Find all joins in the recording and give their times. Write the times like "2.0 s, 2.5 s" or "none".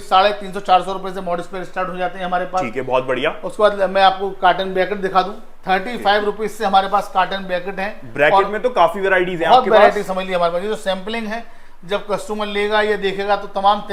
none